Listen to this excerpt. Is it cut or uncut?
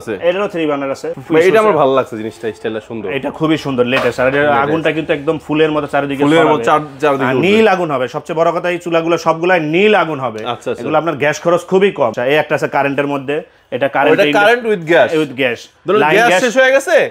cut